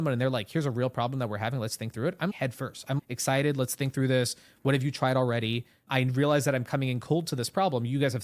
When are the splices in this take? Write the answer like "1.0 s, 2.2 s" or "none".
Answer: 2.8 s, 5.8 s